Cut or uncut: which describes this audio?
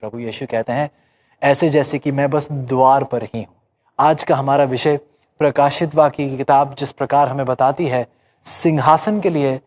cut